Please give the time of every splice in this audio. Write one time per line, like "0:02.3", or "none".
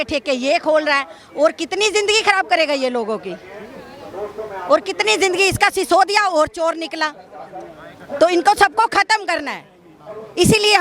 none